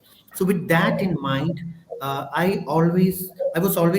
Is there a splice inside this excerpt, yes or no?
no